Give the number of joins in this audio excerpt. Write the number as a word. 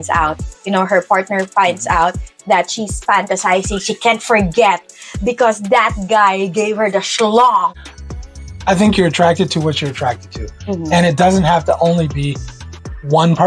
one